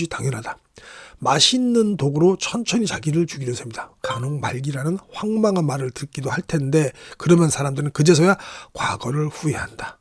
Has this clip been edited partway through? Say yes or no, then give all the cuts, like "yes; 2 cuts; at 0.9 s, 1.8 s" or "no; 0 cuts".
yes; 1 cut; at 3.9 s